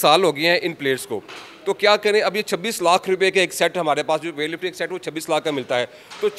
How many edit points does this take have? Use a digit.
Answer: 0